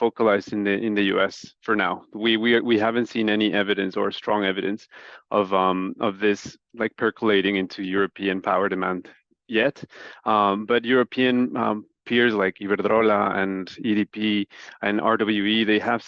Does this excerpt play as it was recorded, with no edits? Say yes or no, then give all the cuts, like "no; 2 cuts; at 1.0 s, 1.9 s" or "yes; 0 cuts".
yes; 0 cuts